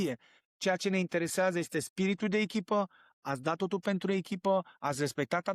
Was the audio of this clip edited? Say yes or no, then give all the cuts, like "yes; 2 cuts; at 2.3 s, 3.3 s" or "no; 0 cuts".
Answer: no; 0 cuts